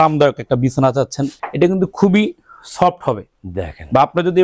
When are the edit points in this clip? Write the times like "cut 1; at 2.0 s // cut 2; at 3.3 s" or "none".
cut 1; at 1.4 s